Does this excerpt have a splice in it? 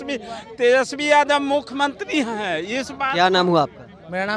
no; 0 cuts

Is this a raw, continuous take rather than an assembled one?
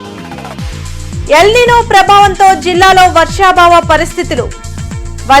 no; 1 cut; at 1.2 s

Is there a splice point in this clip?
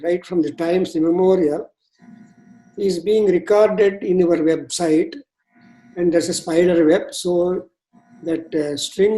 no; 0 cuts

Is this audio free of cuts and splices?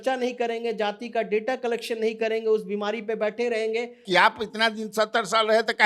no; 1 cut; at 4.0 s

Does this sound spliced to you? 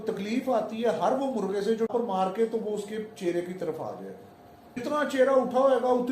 yes; 2 cuts; at 1.9 s, 4.8 s

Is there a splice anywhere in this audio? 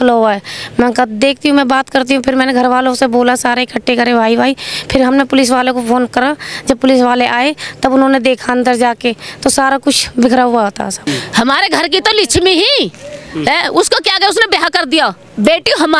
yes; 1 cut; at 11.0 s

